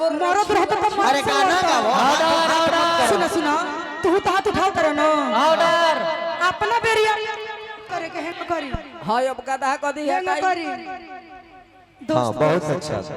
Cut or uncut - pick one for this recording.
cut